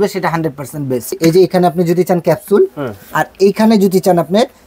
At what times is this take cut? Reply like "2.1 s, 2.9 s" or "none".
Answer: 1.2 s